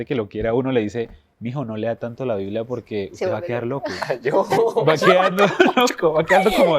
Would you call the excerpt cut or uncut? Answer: uncut